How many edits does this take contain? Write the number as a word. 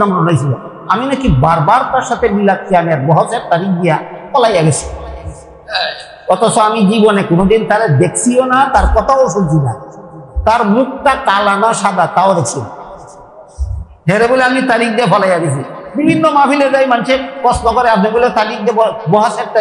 zero